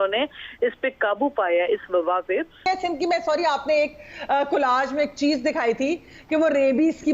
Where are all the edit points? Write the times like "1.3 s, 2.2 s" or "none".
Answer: 2.7 s

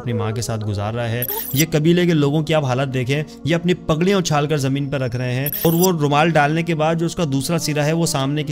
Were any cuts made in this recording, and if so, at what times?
1.4 s, 5.6 s

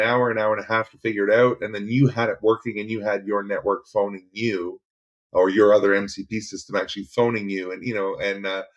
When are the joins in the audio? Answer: none

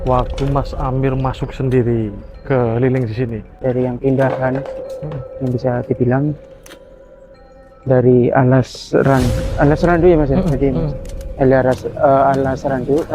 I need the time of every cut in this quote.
3.5 s

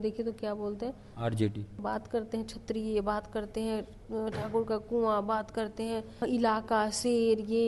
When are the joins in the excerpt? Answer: 1.8 s, 6.2 s

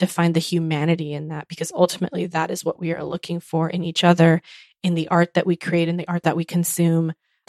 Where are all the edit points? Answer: 6.2 s

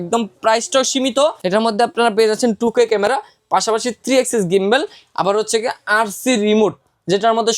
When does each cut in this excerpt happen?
1.4 s

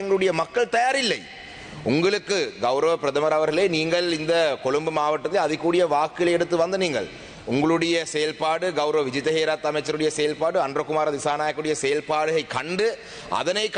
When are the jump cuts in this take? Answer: none

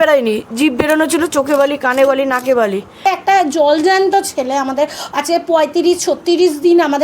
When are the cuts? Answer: 3.0 s

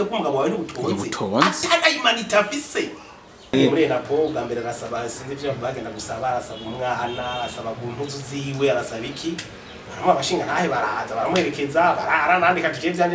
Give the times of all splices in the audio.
3.5 s

